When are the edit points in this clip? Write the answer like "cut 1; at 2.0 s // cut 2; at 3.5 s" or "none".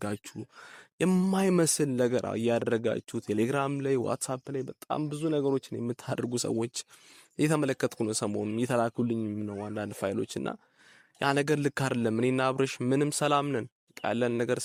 none